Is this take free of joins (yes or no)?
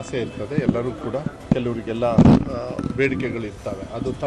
no